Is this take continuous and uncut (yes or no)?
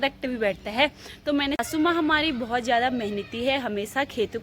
no